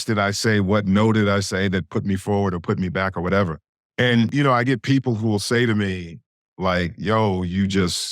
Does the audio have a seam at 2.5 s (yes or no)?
no